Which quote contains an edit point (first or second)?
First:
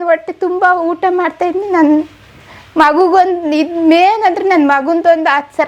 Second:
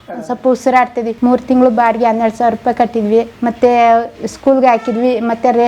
second